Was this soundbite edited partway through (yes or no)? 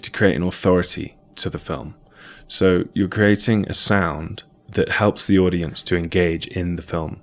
yes